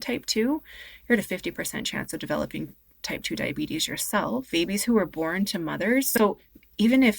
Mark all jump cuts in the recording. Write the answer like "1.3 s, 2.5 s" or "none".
4.5 s